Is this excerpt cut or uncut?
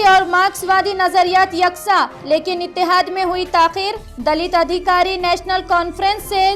uncut